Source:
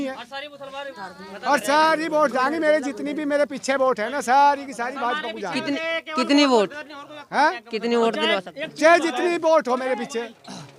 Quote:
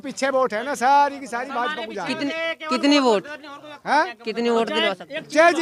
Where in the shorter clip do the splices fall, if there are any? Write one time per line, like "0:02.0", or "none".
none